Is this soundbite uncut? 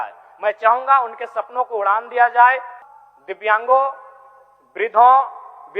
no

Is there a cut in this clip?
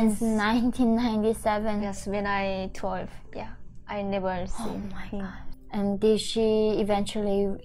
yes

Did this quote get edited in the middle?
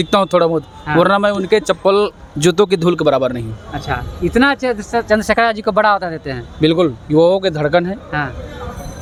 no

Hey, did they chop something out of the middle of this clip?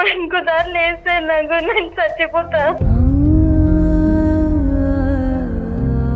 yes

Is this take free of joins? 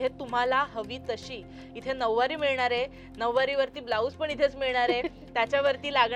yes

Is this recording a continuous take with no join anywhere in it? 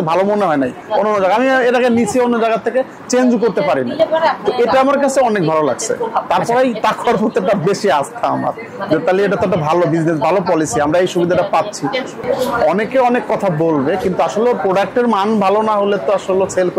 no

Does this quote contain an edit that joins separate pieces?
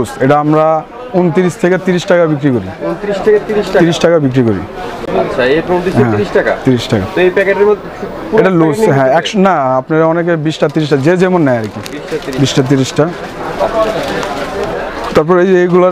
no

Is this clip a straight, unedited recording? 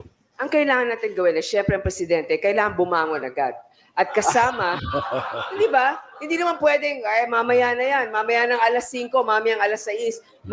yes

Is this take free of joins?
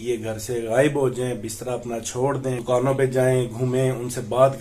no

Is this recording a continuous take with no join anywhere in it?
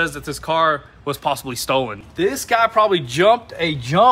no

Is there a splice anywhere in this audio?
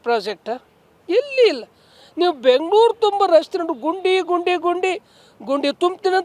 no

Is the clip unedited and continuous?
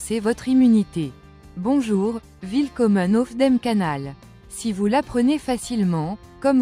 no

